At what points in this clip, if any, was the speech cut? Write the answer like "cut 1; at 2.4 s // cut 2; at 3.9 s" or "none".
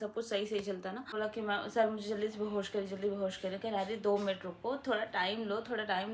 cut 1; at 1.1 s